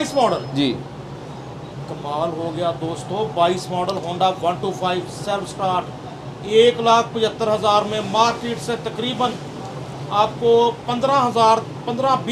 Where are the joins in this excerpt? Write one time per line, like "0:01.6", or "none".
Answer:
none